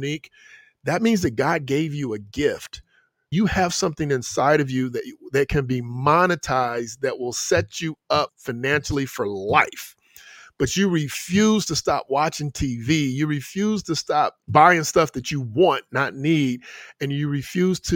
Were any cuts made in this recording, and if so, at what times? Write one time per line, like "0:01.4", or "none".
0:03.3